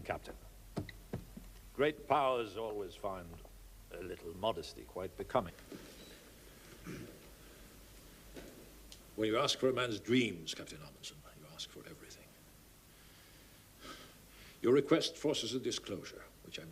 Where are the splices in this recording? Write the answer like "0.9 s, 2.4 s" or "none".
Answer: none